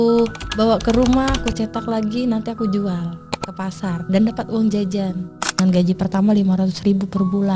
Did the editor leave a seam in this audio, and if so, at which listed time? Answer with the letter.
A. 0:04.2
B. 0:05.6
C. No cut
B